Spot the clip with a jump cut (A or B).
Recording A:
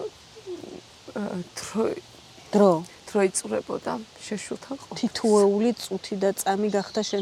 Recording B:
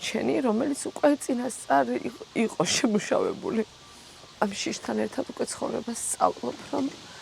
B